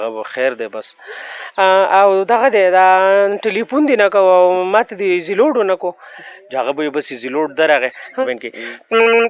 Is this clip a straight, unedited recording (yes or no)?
no